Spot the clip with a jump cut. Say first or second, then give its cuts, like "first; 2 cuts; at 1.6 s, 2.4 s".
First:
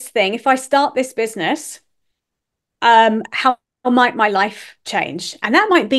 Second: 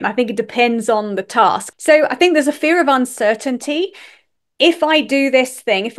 second; 1 cut; at 1.7 s